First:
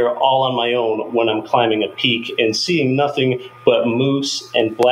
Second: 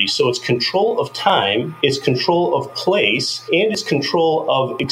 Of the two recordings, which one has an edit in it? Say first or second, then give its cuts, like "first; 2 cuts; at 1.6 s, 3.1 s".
second; 2 cuts; at 1.7 s, 3.3 s